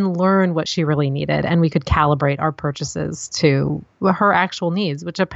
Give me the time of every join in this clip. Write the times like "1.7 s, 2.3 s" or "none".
none